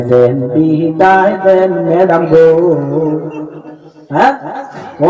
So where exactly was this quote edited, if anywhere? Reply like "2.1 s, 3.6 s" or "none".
none